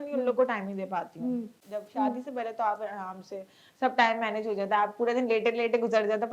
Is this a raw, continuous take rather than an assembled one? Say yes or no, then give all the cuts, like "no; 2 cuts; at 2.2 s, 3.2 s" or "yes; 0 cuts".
no; 1 cut; at 1.6 s